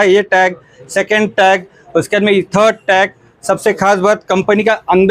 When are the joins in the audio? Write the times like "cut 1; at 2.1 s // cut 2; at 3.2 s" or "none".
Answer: none